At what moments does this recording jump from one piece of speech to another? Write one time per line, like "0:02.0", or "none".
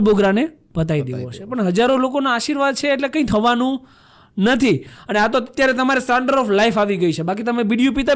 0:04.9